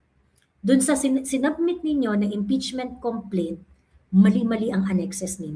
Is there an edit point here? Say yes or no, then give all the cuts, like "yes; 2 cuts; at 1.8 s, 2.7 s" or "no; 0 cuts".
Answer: no; 0 cuts